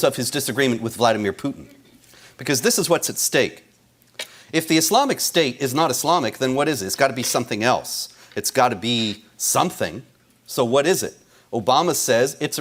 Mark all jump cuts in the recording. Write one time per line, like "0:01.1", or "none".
0:08.8